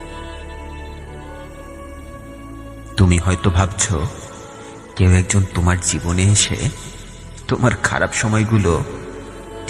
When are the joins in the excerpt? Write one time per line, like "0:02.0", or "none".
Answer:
0:03.0